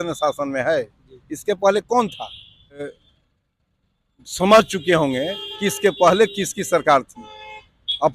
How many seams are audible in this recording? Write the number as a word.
one